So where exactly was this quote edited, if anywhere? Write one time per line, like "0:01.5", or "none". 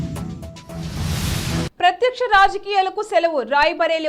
0:01.7